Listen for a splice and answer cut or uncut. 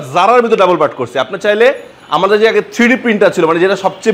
uncut